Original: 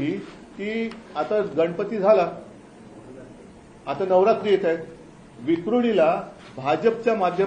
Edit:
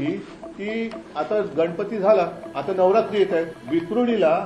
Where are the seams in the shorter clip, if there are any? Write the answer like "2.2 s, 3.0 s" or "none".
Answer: 2.5 s, 3.6 s